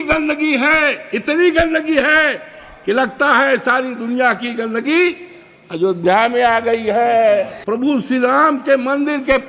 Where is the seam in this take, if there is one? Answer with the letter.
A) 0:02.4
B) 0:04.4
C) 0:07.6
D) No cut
C